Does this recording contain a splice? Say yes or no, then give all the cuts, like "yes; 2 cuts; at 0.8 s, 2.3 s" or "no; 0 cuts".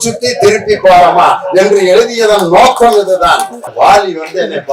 yes; 1 cut; at 3.7 s